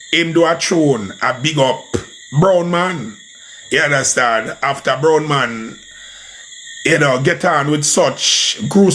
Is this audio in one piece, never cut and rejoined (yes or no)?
yes